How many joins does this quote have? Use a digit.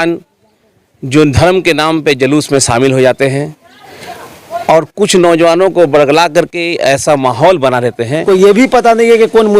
1